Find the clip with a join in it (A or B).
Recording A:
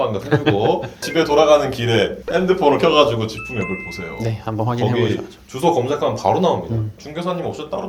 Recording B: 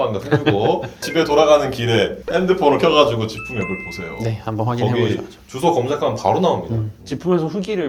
A